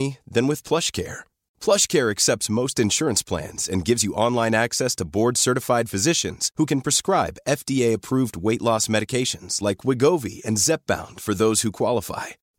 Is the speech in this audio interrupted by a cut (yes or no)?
no